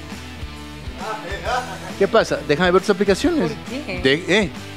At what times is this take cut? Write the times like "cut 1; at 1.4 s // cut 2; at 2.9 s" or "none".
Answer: cut 1; at 1.0 s